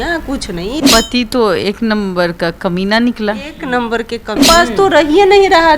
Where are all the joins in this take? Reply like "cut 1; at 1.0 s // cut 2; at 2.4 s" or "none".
cut 1; at 0.8 s // cut 2; at 4.4 s